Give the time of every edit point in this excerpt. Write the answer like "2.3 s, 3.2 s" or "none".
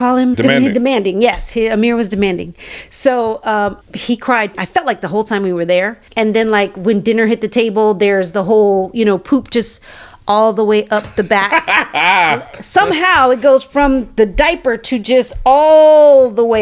3.8 s

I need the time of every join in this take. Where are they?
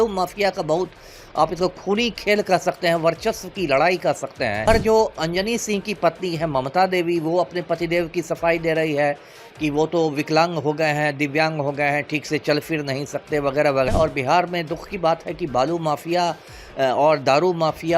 4.6 s, 13.9 s

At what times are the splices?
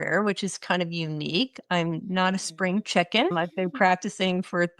3.3 s

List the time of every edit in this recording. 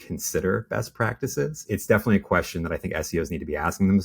1.6 s

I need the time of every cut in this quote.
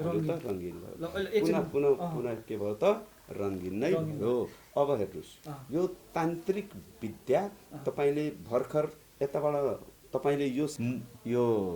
10.7 s

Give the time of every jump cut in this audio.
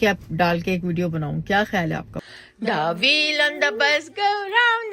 2.1 s

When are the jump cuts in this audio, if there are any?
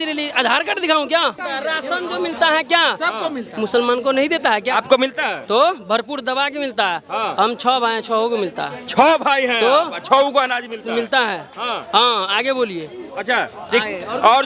1.5 s

